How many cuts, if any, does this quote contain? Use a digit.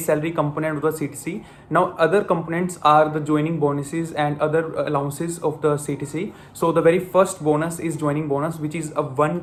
0